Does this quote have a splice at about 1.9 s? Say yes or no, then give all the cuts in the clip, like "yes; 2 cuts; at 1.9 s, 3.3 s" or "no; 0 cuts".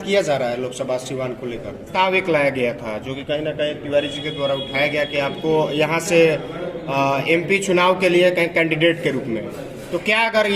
yes; 1 cut; at 1.9 s